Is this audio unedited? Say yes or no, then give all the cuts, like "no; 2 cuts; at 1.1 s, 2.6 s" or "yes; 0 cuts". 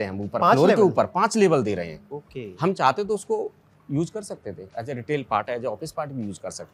yes; 0 cuts